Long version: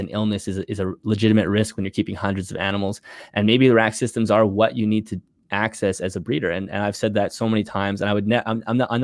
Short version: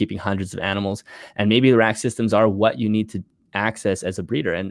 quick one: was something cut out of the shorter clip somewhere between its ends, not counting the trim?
no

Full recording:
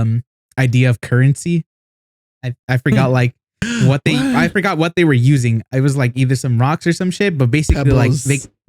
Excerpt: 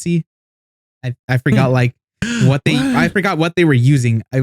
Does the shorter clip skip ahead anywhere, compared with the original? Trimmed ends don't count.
no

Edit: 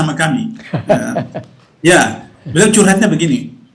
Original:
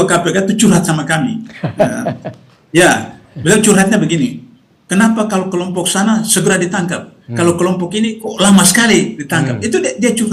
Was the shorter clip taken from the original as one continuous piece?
yes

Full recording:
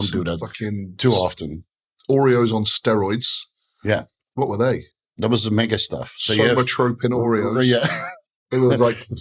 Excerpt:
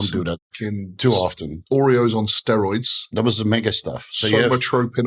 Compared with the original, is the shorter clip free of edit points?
no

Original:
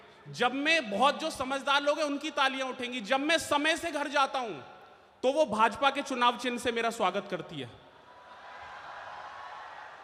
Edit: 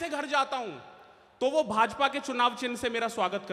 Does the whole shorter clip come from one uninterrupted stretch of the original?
yes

